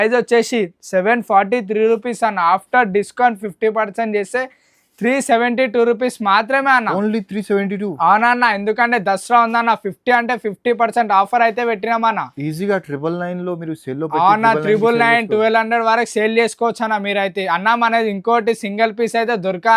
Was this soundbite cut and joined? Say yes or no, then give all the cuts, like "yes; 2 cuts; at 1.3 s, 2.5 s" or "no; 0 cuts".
no; 0 cuts